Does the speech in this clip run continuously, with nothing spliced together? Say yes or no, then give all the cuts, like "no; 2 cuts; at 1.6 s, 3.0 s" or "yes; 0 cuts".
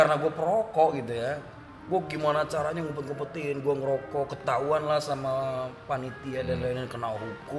yes; 0 cuts